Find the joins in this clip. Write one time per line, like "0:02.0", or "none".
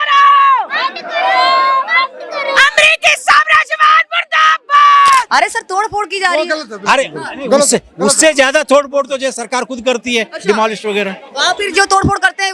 0:05.3